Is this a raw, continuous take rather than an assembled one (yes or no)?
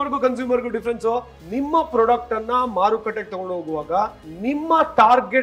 no